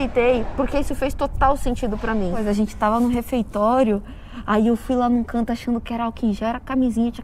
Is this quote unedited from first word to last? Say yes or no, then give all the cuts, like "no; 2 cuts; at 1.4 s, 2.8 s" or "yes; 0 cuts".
no; 1 cut; at 2.4 s